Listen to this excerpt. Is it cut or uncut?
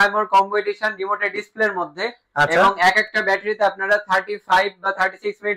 uncut